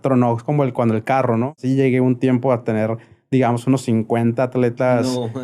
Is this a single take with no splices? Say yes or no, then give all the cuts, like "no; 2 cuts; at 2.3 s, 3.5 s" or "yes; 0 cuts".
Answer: no; 1 cut; at 1.5 s